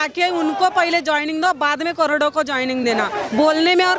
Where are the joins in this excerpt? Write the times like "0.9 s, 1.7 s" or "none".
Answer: none